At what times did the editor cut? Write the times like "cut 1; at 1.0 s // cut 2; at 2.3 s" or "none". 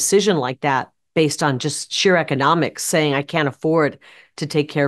none